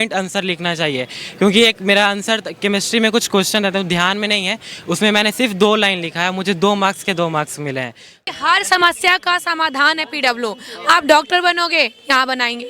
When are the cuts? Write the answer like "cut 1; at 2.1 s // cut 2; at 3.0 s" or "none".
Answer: cut 1; at 8.2 s